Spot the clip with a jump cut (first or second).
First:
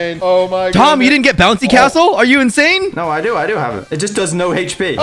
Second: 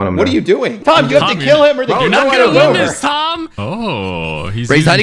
second